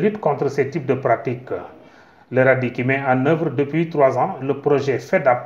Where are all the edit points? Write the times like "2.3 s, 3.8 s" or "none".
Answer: 1.6 s

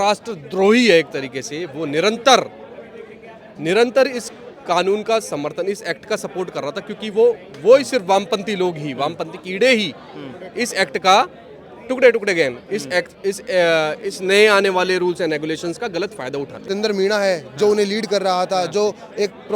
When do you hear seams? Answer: 16.6 s

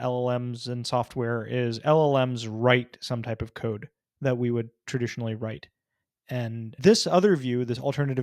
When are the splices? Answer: 6.8 s

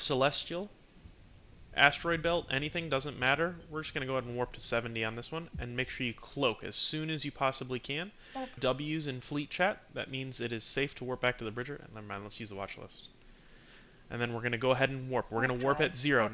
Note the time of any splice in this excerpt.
8.6 s

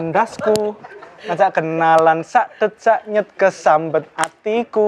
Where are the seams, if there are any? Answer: none

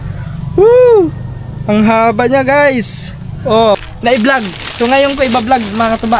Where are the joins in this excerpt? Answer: 3.8 s

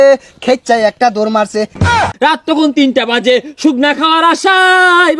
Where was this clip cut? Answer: 2.1 s

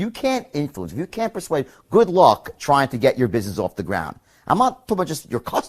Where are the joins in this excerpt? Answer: none

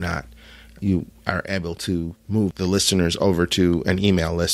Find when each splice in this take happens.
none

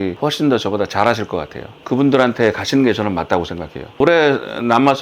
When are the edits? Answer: 4.0 s

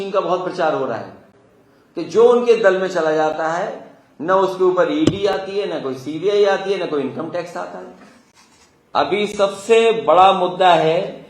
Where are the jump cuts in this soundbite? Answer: 8.8 s

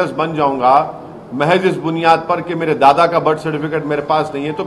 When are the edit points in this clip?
none

